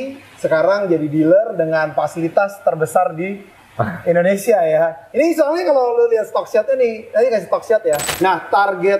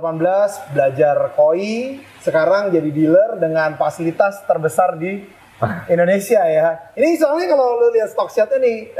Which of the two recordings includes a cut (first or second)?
first